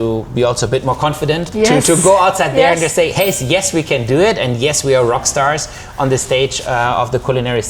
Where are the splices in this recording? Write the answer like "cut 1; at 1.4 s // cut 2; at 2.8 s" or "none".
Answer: none